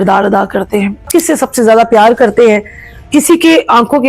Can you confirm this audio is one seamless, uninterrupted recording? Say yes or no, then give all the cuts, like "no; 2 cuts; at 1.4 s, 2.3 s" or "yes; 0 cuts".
no; 1 cut; at 1.1 s